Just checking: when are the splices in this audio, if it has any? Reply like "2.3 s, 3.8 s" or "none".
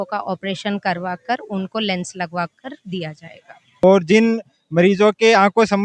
3.8 s

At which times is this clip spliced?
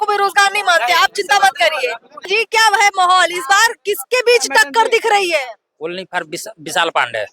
2.2 s

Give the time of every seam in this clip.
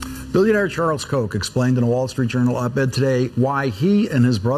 none

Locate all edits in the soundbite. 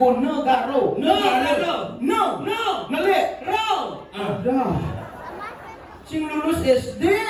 none

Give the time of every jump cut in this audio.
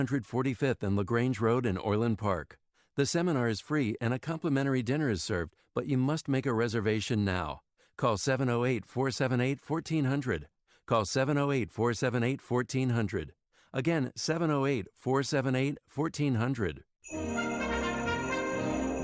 16.9 s

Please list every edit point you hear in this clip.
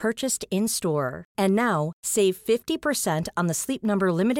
none

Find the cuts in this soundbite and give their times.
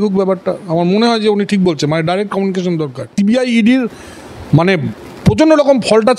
3.1 s

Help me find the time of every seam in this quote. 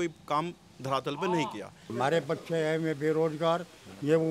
1.9 s

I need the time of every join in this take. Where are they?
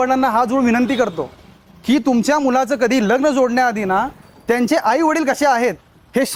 none

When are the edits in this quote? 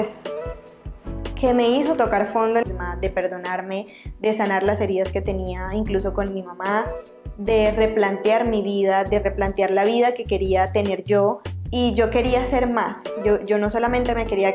2.6 s, 11.5 s

